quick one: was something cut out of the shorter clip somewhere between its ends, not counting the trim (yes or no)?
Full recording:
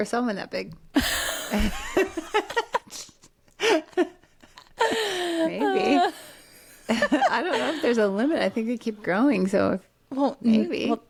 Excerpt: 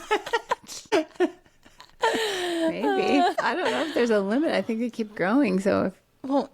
yes